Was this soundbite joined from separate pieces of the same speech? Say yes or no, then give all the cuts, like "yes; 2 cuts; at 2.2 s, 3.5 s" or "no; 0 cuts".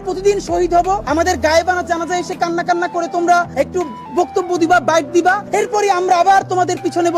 yes; 3 cuts; at 1.0 s, 3.5 s, 5.4 s